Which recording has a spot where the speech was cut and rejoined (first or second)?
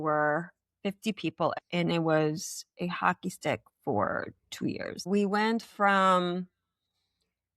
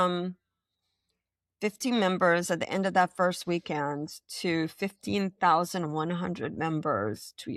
first